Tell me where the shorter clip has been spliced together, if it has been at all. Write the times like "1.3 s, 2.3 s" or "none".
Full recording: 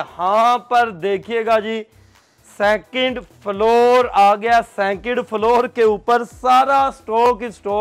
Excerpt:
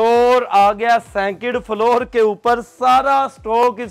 none